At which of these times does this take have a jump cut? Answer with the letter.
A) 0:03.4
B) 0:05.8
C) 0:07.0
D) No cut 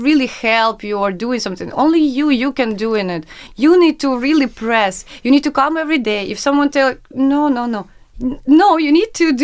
A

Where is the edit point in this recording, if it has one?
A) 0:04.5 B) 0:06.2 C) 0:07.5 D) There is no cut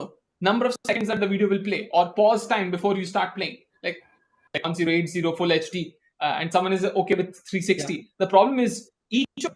A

